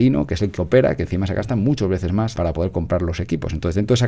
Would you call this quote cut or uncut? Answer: cut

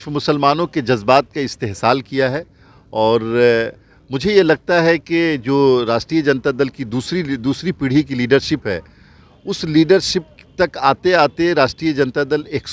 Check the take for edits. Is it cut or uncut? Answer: uncut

